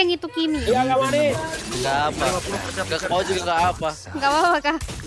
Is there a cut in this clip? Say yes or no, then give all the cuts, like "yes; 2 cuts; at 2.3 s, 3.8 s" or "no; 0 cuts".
no; 0 cuts